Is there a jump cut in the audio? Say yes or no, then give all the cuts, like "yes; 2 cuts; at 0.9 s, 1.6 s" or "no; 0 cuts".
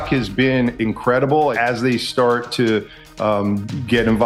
yes; 1 cut; at 1.6 s